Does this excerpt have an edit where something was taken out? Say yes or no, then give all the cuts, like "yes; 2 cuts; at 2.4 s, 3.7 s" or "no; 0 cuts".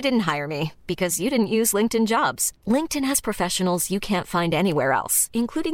no; 0 cuts